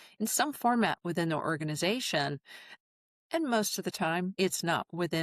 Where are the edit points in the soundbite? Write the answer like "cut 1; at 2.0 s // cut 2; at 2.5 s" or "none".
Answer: cut 1; at 4.3 s